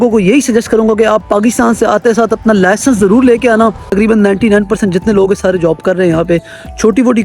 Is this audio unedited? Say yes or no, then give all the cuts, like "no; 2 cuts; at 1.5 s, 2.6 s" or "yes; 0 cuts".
no; 1 cut; at 3.8 s